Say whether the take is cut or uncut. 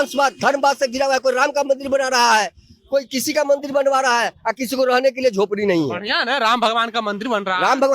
uncut